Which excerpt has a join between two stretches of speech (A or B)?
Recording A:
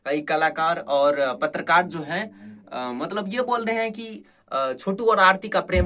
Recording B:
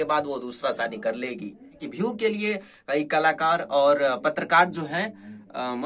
B